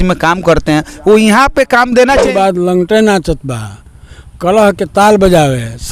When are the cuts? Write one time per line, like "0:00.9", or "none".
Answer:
0:02.3